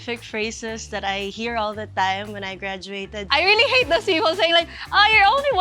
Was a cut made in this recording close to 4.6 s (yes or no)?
no